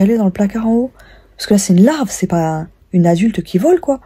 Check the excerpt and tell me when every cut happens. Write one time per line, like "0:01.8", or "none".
none